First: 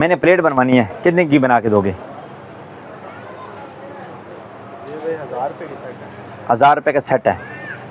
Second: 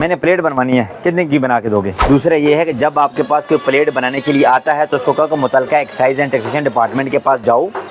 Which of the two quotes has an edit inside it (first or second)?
second